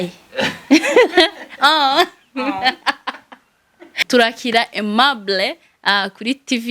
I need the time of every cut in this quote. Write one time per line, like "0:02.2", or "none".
0:03.9